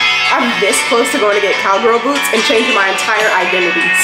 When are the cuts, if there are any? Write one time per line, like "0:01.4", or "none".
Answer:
none